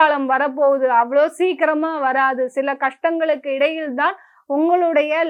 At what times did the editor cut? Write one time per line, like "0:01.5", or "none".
none